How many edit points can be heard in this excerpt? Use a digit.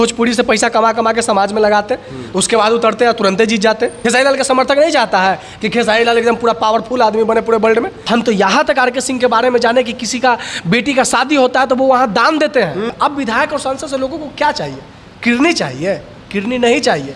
3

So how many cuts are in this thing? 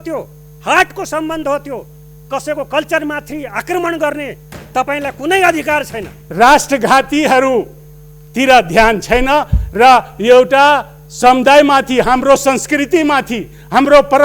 1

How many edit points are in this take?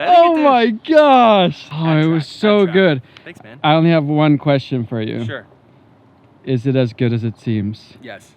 1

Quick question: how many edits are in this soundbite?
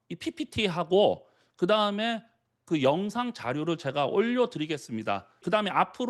0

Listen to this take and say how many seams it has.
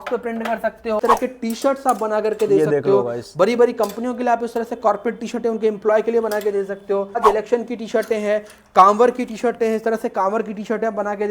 2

